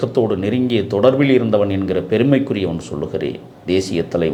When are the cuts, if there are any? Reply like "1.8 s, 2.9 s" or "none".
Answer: none